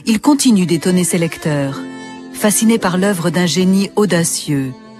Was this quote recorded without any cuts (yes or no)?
yes